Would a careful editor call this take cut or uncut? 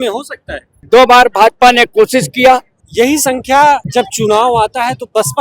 cut